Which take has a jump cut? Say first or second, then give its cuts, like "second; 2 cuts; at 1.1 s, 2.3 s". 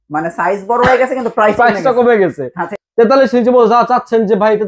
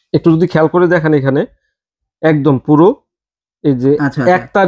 first; 1 cut; at 2.7 s